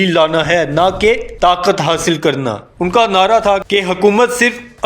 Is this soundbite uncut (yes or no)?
no